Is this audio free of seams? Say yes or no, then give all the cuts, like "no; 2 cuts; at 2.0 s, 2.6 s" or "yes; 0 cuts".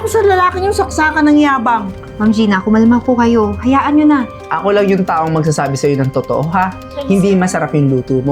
no; 1 cut; at 4.3 s